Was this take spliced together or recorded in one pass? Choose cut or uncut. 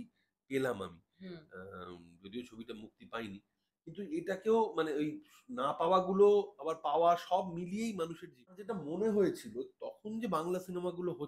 cut